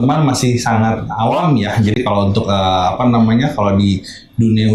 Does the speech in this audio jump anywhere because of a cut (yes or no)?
no